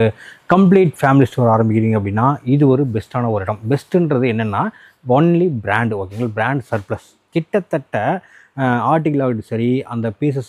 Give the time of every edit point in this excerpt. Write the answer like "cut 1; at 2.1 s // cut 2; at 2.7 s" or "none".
none